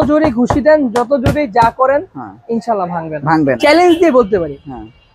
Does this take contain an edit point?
yes; 1 cut; at 3.6 s

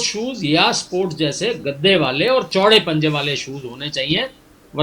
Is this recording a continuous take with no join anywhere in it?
yes; 0 cuts

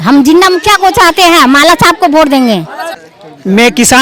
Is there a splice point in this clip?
yes; 1 cut; at 2.9 s

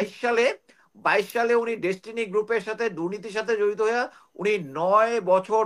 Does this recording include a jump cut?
no; 0 cuts

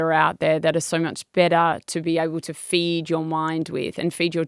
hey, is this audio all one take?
yes; 0 cuts

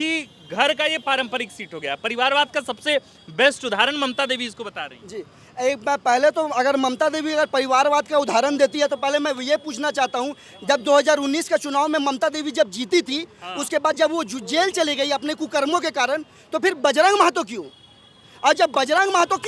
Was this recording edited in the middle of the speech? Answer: no; 0 cuts

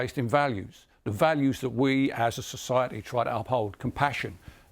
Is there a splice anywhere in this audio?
no; 0 cuts

